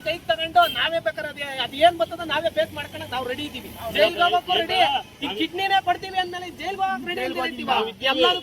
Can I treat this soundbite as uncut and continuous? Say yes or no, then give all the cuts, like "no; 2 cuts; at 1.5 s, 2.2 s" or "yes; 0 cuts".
yes; 0 cuts